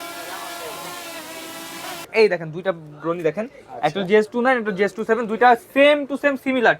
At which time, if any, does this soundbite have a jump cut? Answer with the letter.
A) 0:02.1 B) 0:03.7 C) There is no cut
A